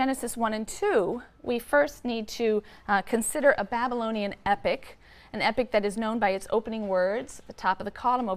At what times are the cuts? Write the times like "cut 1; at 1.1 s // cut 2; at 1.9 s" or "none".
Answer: none